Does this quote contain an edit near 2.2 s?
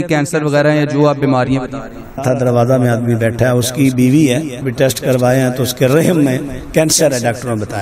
yes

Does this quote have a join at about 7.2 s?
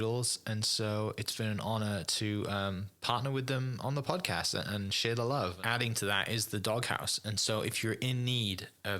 no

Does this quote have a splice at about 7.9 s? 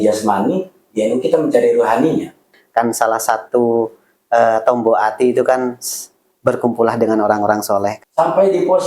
yes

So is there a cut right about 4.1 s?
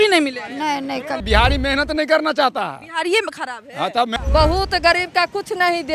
yes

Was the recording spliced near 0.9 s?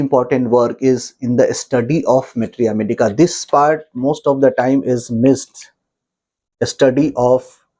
no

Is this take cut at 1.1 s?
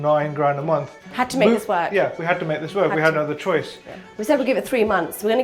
yes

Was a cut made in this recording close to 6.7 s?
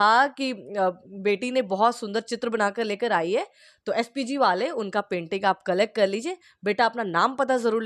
no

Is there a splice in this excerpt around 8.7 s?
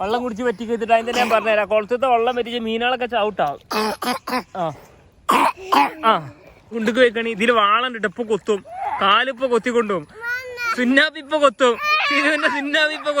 no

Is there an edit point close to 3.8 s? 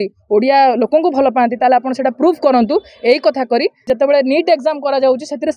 yes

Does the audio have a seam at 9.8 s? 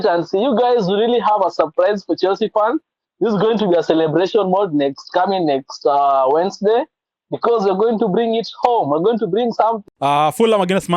yes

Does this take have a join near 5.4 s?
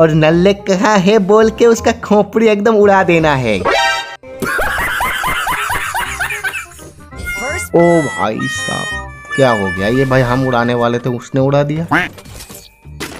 no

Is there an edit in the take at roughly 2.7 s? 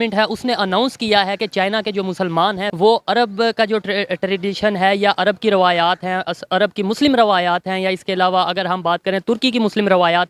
yes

